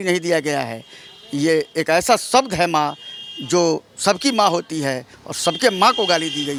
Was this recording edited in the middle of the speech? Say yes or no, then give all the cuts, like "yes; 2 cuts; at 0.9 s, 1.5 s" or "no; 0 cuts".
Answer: no; 0 cuts